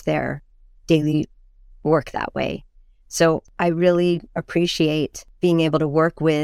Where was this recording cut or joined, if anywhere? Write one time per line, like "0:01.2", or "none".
0:03.5
0:05.2